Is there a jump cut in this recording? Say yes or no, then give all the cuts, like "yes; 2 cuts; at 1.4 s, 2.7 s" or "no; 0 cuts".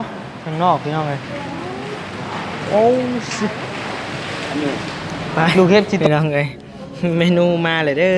yes; 1 cut; at 6.0 s